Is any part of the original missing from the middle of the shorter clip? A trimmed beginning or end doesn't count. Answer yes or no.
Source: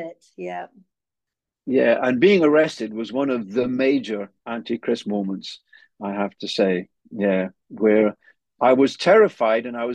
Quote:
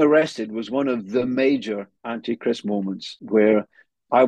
yes